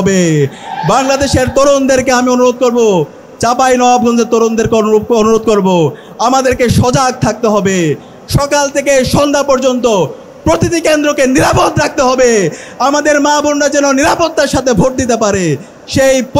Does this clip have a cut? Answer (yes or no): no